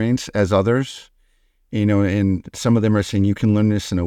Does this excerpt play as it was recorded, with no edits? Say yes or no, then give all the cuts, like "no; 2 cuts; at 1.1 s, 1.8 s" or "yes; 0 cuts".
yes; 0 cuts